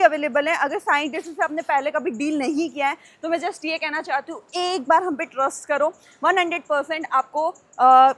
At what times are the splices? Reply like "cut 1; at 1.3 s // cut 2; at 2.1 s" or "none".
none